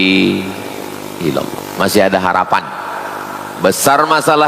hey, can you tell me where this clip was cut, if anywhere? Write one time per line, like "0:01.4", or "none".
0:01.6